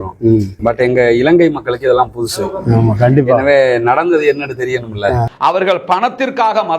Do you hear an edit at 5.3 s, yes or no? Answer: yes